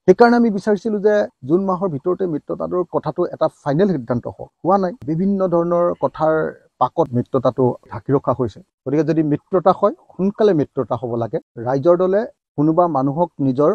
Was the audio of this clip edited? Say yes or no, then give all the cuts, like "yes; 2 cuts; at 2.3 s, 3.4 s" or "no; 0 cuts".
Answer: yes; 2 cuts; at 8.7 s, 11.4 s